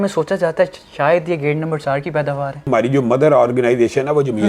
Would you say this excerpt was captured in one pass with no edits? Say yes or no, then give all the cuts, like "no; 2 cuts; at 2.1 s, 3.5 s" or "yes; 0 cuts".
no; 1 cut; at 2.7 s